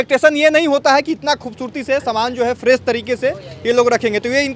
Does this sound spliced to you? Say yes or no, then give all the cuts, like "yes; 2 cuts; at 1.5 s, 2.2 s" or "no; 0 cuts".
no; 0 cuts